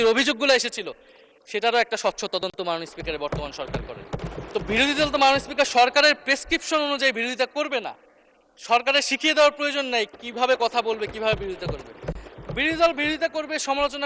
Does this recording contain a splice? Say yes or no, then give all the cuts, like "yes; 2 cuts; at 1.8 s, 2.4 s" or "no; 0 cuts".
yes; 1 cut; at 4.2 s